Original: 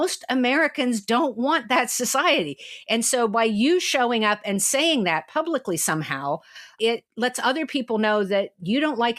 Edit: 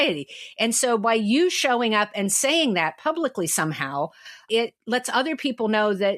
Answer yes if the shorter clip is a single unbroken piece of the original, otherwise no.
yes